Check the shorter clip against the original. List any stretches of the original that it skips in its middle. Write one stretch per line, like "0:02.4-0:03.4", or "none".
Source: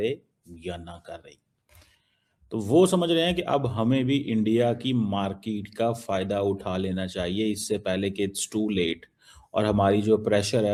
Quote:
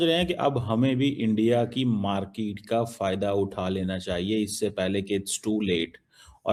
none